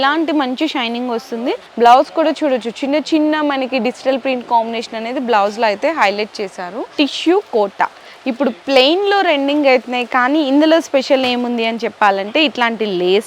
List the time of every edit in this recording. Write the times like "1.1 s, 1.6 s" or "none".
1.6 s, 6.9 s

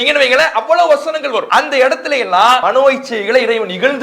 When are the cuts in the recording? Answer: 1.5 s, 2.6 s

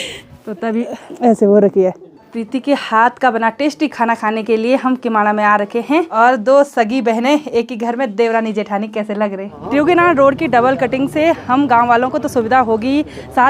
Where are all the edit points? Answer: 2.4 s, 6.1 s, 9.5 s

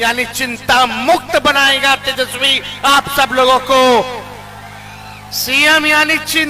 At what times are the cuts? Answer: none

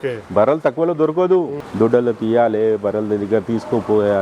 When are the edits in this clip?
1.6 s

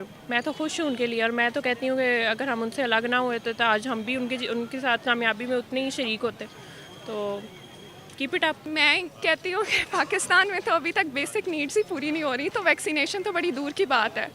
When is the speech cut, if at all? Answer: 8.6 s

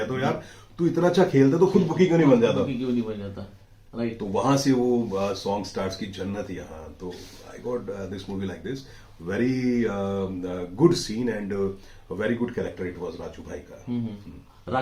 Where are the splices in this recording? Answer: none

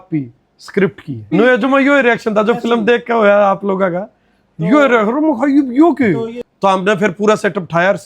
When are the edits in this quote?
1.3 s, 6.4 s

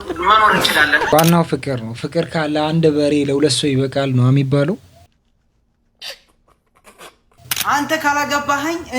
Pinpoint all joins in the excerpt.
1.1 s, 7.3 s

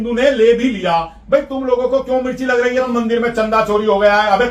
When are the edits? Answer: 2.9 s

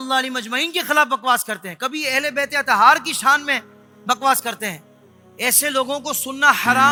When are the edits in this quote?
none

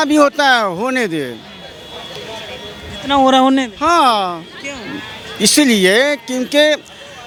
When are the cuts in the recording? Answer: none

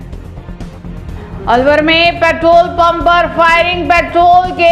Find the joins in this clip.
1.1 s

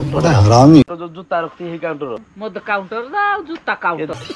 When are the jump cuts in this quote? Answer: 1.1 s

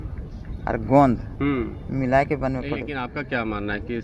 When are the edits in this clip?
3.0 s

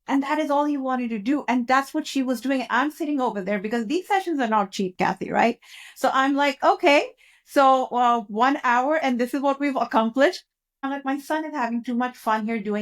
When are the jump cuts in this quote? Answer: 10.8 s

